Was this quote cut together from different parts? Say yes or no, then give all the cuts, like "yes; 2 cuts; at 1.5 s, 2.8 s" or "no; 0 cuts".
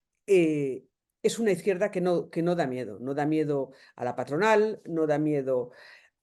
no; 0 cuts